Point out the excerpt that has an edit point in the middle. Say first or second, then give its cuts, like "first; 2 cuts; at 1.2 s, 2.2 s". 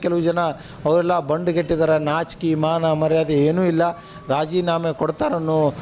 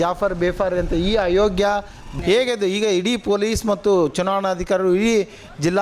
second; 1 cut; at 2.1 s